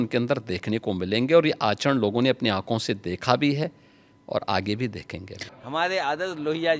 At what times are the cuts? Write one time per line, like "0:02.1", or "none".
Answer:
0:05.4